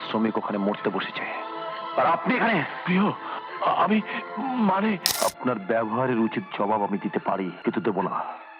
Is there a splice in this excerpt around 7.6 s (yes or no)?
yes